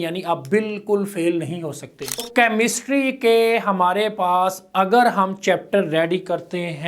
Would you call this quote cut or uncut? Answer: cut